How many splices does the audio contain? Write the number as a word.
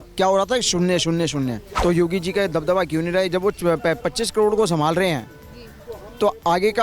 one